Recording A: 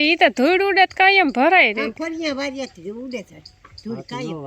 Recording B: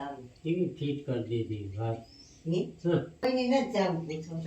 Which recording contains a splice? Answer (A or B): B